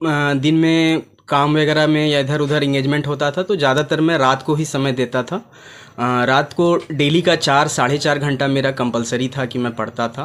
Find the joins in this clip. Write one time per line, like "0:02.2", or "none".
none

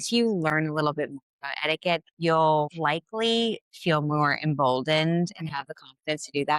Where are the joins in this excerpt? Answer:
0:02.1
0:02.7

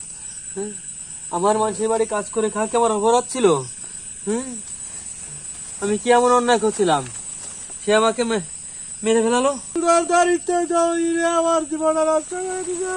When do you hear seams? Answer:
0:09.8

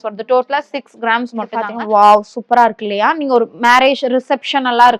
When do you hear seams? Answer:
0:01.6

